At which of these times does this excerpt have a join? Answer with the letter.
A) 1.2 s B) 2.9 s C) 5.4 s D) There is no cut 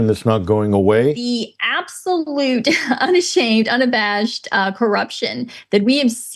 A